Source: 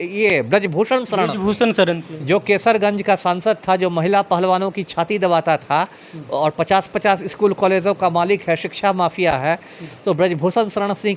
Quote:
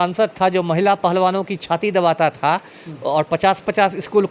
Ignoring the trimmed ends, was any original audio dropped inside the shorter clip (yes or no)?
no